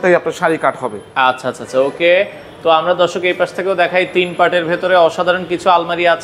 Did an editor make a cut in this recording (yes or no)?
no